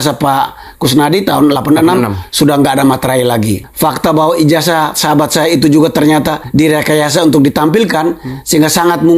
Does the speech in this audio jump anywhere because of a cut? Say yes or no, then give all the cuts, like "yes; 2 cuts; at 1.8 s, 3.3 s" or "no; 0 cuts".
yes; 2 cuts; at 3.6 s, 6.4 s